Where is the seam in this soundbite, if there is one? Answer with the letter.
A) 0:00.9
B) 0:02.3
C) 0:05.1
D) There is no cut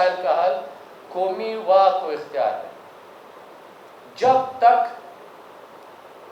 D